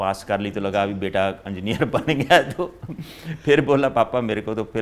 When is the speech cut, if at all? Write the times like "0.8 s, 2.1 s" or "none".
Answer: none